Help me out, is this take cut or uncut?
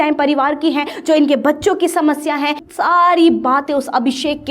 cut